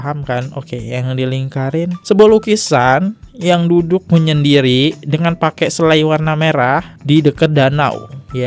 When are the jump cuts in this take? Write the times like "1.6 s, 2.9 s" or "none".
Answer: none